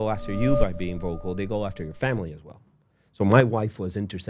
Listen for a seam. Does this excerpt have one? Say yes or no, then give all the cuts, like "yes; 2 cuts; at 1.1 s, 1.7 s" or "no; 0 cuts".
no; 0 cuts